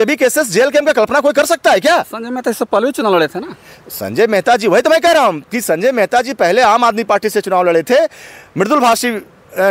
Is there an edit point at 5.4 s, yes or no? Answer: no